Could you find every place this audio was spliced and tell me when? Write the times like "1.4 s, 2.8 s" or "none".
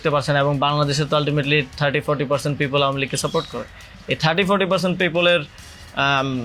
none